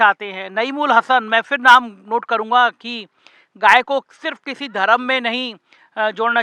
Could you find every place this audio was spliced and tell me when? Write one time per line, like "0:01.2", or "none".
none